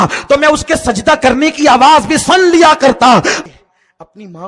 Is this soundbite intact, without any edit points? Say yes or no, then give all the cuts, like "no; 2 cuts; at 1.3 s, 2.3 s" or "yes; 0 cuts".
no; 1 cut; at 3.4 s